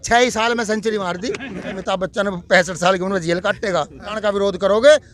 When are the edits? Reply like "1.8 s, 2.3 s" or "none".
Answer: 1.8 s, 4.2 s